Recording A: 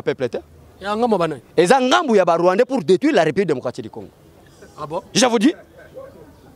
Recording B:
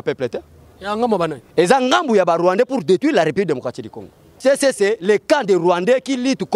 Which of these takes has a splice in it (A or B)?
B